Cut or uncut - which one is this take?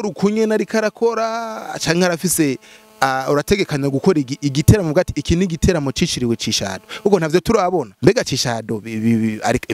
cut